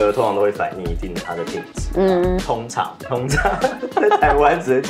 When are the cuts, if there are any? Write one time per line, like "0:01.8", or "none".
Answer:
none